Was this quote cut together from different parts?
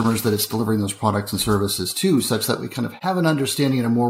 yes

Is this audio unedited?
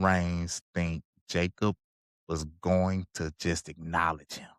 yes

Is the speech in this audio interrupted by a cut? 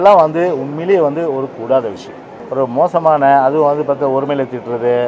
yes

